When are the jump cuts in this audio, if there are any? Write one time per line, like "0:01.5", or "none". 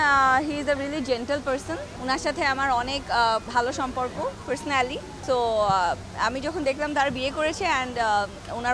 0:01.9
0:03.5
0:05.1

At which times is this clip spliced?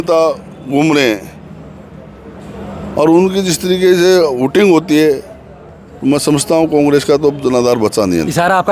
none

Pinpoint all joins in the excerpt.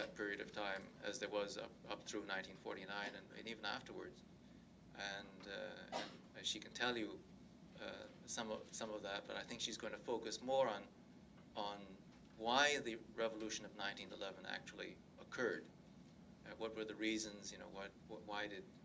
none

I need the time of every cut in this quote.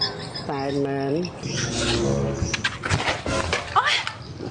0:01.5

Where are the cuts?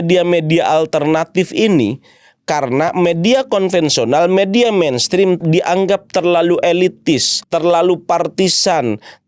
0:05.4
0:07.3

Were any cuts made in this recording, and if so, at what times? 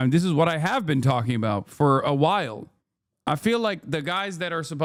none

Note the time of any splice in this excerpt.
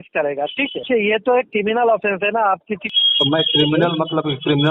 0:00.8
0:02.8

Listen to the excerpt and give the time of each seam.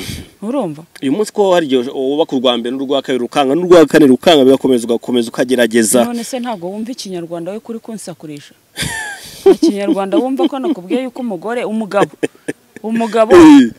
none

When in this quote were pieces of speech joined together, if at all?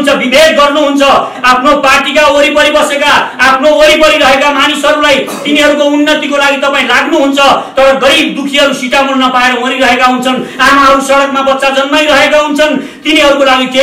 0:01.3

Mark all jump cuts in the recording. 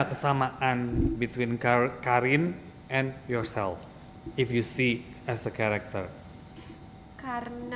0:06.6

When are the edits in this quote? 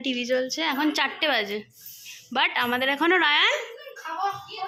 none

